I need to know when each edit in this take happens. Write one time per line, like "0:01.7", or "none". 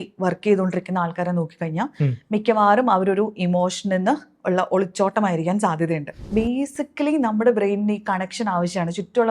0:06.2